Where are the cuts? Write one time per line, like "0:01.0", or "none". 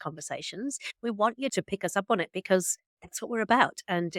0:01.5